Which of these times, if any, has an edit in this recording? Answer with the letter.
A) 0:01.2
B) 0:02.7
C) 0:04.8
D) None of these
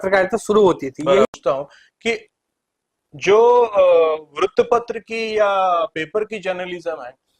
A